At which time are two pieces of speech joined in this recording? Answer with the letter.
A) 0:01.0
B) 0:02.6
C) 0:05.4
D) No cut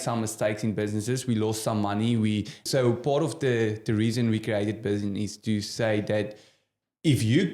B